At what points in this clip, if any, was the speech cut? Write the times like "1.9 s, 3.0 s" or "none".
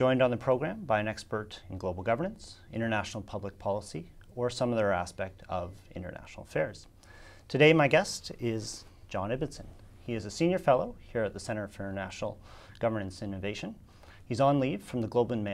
14.5 s